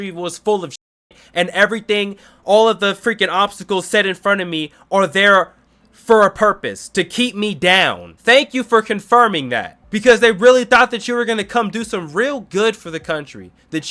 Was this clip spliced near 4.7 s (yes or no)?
no